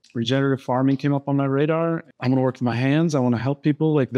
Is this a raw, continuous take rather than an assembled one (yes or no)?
no